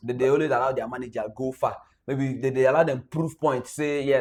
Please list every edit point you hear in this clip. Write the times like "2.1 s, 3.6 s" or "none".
none